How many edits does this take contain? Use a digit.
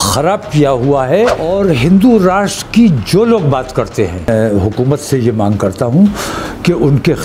2